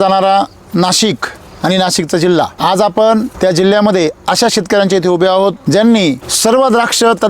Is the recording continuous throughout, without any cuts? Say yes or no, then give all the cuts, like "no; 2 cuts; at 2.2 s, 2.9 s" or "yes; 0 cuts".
no; 4 cuts; at 2.5 s, 3.3 s, 5.6 s, 6.3 s